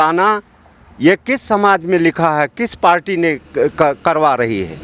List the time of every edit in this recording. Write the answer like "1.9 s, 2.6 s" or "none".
none